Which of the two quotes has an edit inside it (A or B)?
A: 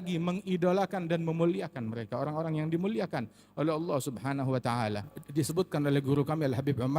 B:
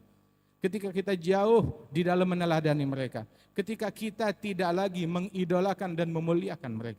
A